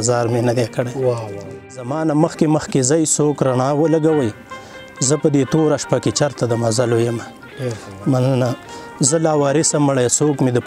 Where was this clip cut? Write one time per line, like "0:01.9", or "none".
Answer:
0:01.6